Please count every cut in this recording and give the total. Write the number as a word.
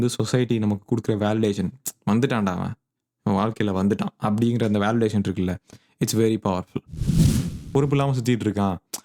one